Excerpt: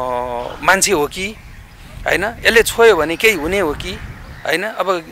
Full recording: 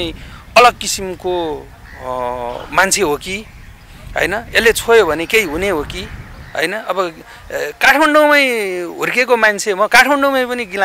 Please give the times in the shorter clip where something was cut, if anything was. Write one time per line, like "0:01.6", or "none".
none

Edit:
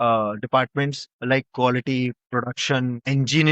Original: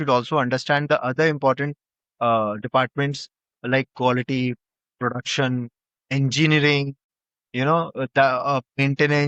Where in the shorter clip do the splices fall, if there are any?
0:01.1
0:02.6

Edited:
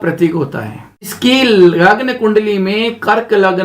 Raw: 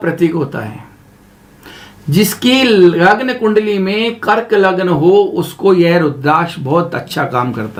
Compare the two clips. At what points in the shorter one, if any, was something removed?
0:01.1

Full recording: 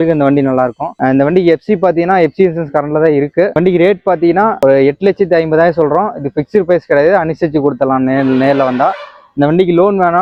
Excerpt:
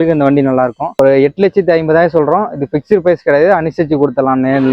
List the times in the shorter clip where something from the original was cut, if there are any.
0:00.9

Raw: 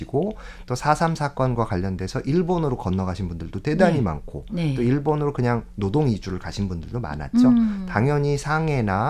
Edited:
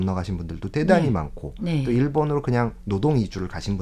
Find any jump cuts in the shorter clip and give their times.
none

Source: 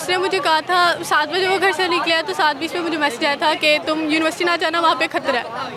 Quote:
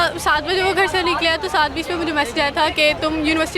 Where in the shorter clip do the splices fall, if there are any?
none

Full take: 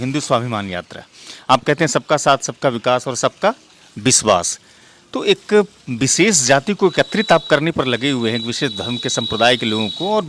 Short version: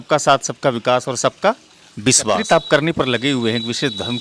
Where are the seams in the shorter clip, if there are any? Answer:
0:02.4

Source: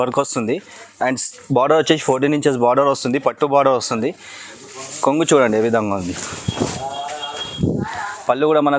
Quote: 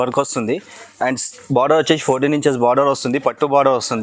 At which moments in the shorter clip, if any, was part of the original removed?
none

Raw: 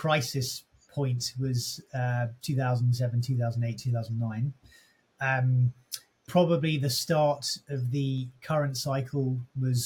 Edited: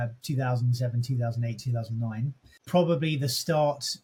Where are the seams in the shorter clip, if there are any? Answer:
0:02.5

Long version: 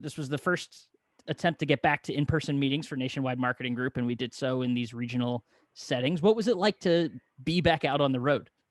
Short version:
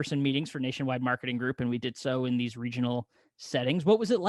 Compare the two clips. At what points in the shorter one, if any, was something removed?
none

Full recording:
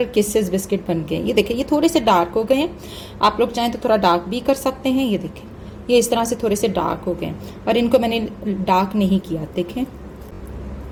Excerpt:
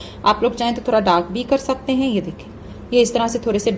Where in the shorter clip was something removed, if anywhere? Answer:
none

